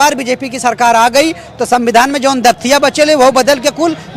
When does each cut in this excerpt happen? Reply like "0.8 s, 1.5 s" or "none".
none